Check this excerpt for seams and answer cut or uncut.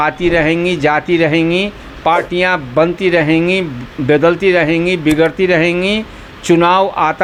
uncut